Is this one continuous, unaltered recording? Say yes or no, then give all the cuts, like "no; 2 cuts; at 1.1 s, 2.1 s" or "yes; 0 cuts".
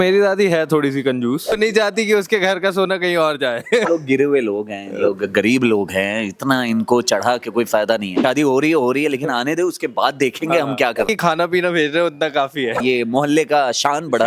no; 5 cuts; at 1.6 s, 3.9 s, 8.2 s, 11.1 s, 12.8 s